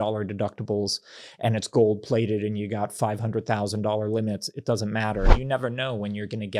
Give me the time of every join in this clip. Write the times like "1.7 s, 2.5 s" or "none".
5.4 s